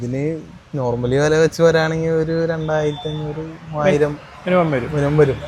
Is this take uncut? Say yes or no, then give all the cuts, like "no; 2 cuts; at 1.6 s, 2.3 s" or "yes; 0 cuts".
yes; 0 cuts